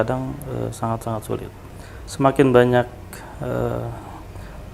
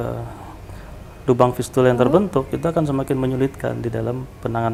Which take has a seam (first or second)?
first